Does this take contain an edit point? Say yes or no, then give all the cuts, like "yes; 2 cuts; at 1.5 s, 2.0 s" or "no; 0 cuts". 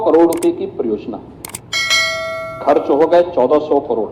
no; 0 cuts